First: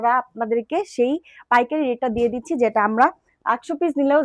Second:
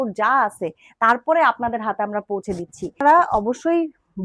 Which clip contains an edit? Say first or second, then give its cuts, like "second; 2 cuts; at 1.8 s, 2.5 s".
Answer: second; 1 cut; at 3.0 s